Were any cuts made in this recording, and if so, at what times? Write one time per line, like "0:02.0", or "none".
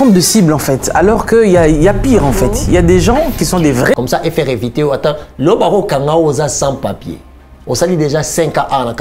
0:03.9